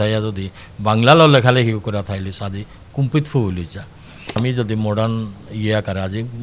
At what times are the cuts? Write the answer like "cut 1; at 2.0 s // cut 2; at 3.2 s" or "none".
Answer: cut 1; at 4.3 s